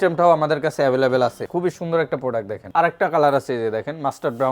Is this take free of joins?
no; 2 cuts; at 1.5 s, 2.6 s

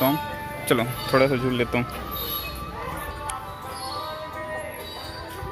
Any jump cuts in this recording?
no; 0 cuts

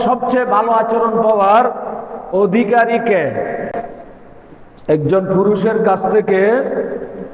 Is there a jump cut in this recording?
no; 0 cuts

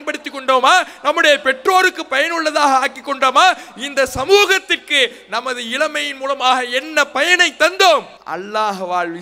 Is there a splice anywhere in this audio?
yes; 1 cut; at 8.2 s

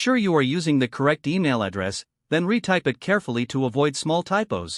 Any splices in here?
no; 0 cuts

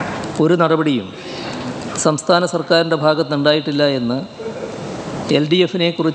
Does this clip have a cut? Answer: no; 0 cuts

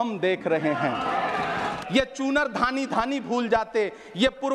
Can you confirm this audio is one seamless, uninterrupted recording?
no; 1 cut; at 1.8 s

